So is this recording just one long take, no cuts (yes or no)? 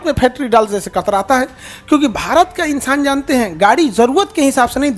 yes